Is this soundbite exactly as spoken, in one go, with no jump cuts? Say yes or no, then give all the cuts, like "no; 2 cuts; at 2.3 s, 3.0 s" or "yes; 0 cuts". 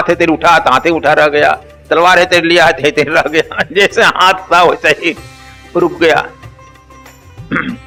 yes; 0 cuts